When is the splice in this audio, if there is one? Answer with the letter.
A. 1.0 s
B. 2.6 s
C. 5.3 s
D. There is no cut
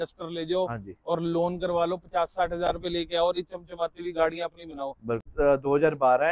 C